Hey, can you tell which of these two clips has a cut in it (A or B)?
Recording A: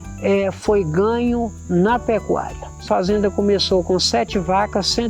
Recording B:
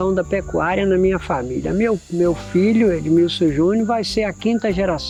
A